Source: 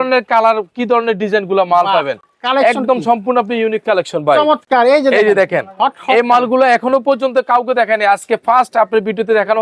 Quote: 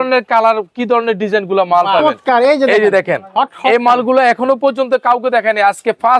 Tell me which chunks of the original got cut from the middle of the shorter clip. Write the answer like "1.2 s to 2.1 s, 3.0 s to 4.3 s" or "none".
2.0 s to 4.5 s